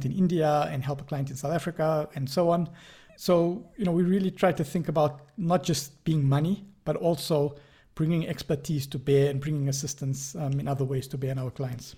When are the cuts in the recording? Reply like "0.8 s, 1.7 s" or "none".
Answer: none